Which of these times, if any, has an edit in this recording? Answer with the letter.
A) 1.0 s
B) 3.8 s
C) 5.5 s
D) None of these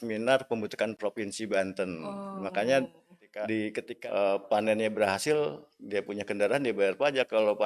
B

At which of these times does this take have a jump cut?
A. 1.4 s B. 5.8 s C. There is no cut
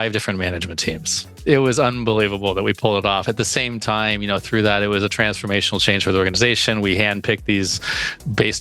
A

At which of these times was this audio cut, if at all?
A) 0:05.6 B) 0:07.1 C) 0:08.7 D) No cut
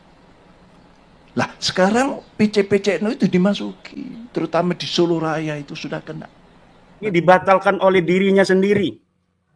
B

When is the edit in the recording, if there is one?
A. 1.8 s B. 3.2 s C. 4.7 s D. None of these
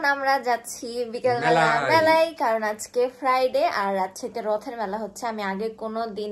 D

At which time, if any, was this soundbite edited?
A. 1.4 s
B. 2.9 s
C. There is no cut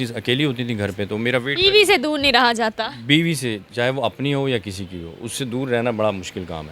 C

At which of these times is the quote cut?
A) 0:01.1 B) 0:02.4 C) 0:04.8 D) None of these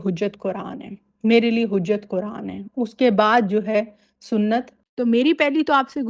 C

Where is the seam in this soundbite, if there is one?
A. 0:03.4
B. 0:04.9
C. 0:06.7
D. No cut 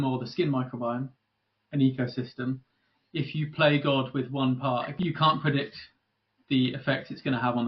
B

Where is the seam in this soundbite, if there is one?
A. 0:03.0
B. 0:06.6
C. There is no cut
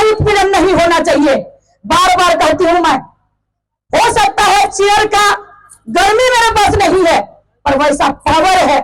C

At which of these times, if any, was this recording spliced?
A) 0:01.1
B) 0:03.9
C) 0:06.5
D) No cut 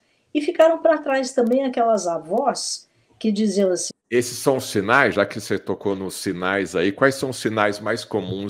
B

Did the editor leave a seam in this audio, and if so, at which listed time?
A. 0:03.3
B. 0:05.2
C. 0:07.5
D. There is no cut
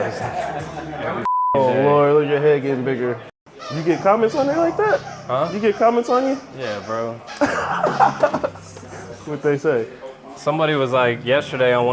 A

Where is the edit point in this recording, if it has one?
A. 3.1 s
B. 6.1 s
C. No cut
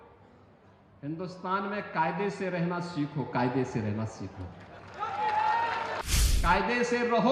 B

